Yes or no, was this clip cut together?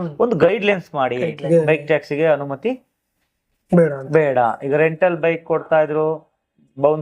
yes